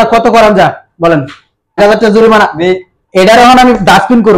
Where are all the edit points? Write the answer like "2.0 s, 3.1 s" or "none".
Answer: 1.8 s